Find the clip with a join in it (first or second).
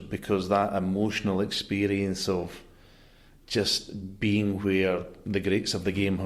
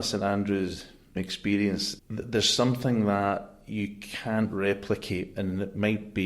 second